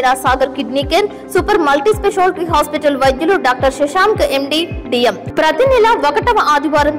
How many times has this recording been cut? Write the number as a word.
one